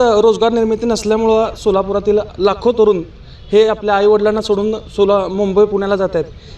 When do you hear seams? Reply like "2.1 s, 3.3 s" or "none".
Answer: none